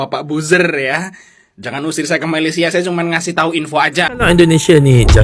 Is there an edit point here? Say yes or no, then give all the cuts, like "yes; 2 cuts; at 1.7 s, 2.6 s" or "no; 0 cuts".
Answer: yes; 1 cut; at 4.2 s